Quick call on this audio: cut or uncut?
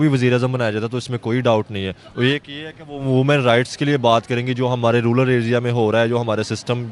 uncut